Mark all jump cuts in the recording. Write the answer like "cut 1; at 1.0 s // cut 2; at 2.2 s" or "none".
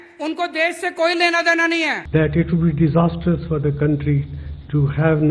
cut 1; at 2.0 s